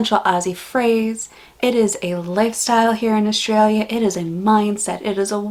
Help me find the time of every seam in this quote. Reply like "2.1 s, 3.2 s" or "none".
none